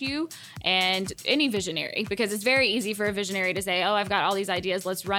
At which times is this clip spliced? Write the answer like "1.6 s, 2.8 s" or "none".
1.1 s